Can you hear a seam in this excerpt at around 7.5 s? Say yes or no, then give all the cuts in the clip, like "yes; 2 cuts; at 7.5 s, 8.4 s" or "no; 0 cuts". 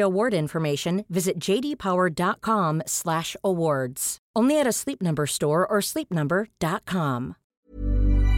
yes; 1 cut; at 7.5 s